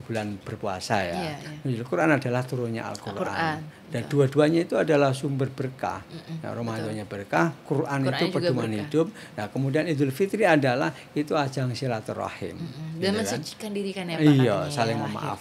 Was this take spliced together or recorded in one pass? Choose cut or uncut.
uncut